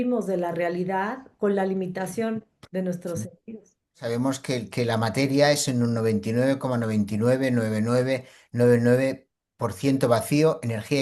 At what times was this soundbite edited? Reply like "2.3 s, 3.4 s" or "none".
4.0 s